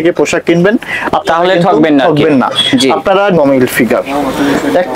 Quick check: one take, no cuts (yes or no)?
no